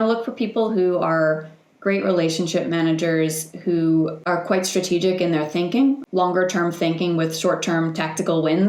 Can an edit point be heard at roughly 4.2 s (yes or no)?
yes